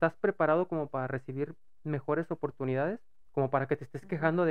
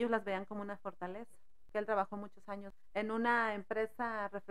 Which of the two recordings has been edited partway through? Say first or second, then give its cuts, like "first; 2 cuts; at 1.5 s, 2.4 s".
second; 2 cuts; at 1.6 s, 2.8 s